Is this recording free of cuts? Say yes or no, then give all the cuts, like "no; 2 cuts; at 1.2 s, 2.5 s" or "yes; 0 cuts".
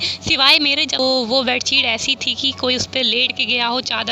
no; 1 cut; at 1.0 s